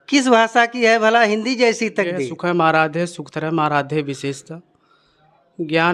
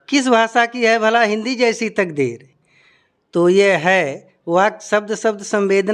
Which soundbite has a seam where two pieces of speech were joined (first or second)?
first